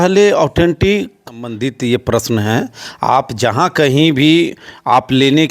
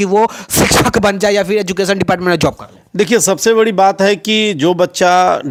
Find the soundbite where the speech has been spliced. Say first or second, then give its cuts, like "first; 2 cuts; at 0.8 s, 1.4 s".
first; 1 cut; at 1.5 s